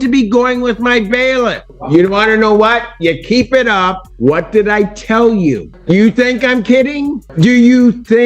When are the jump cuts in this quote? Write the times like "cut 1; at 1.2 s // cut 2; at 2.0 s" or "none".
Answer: cut 1; at 1.7 s // cut 2; at 4.0 s // cut 3; at 5.7 s // cut 4; at 7.2 s